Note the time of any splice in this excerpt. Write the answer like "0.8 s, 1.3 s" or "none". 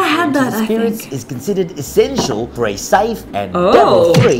2.5 s, 3.2 s